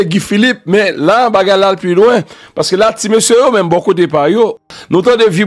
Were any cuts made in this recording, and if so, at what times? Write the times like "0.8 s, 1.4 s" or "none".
4.6 s